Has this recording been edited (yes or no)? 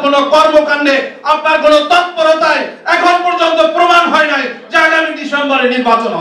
no